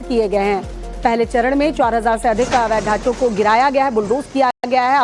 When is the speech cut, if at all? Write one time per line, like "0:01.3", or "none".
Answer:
none